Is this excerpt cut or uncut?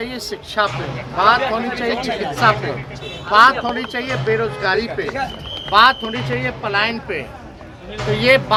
uncut